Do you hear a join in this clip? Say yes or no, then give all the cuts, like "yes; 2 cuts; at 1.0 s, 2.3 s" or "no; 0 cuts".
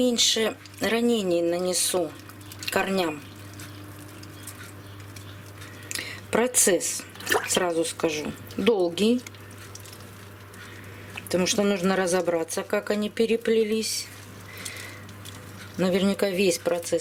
no; 0 cuts